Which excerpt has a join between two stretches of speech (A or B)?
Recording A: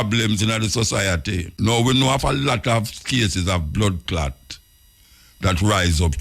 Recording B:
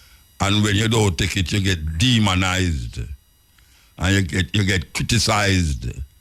A